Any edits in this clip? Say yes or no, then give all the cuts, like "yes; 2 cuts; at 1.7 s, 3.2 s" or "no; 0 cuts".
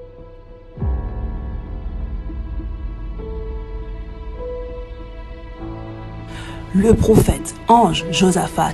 yes; 1 cut; at 6.7 s